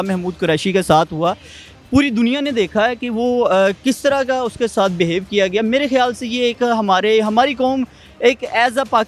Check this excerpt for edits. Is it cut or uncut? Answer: uncut